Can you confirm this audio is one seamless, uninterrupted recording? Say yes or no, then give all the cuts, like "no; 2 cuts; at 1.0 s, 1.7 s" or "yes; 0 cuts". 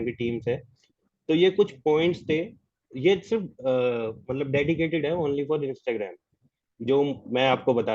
yes; 0 cuts